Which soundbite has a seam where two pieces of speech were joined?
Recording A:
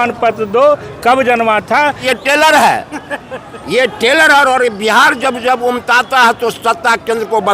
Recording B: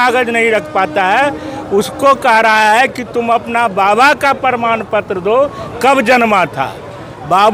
A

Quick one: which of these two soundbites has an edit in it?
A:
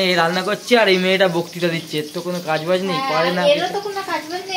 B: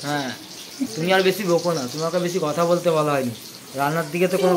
B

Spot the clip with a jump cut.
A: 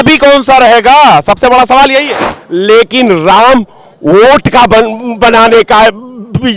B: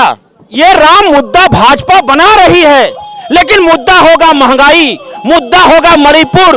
A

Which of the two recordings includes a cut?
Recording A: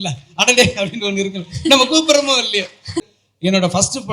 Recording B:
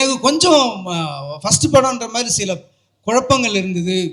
A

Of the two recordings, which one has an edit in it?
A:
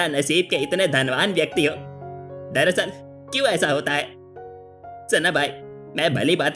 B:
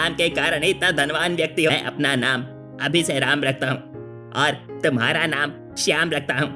B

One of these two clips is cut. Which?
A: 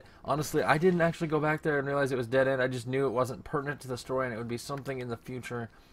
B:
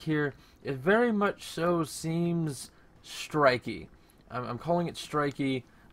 B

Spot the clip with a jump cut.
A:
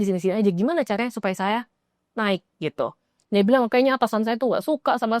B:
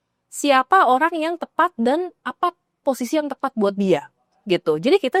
A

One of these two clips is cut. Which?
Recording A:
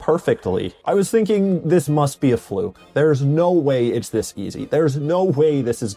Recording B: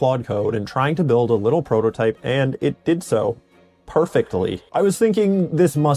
B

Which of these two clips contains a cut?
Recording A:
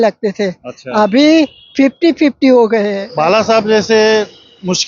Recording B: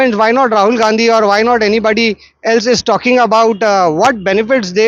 A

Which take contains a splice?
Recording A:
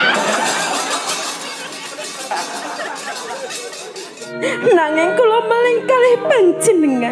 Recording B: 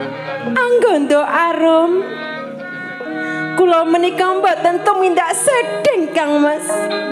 A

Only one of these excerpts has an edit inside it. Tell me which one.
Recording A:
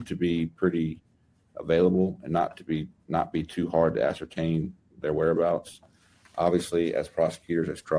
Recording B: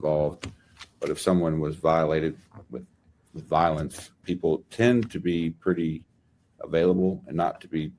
B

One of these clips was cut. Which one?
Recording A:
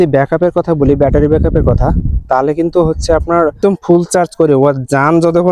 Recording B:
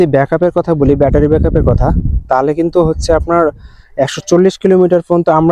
A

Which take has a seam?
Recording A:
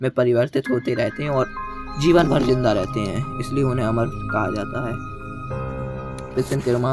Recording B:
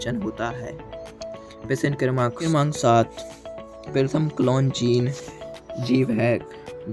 B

